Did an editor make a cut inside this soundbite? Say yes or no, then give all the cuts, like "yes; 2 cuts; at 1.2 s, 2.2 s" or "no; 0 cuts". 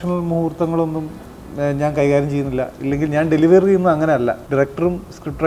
yes; 1 cut; at 4.4 s